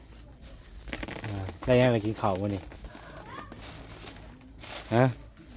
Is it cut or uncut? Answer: uncut